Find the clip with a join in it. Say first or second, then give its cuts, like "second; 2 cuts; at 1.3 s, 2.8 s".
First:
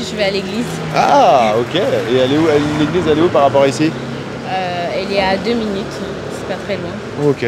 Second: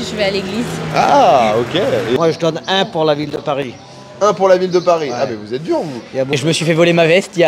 second; 2 cuts; at 2.2 s, 6.3 s